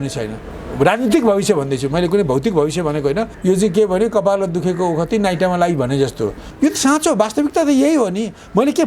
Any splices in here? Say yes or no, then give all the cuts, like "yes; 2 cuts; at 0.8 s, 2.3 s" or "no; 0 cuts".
yes; 2 cuts; at 3.3 s, 6.5 s